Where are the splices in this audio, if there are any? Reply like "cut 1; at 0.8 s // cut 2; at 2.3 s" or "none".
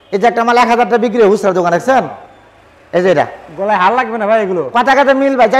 none